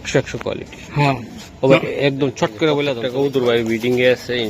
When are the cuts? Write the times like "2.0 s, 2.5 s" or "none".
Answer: 3.0 s